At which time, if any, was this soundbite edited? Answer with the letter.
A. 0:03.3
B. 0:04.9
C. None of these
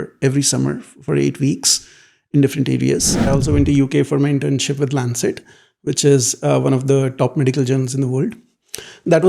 A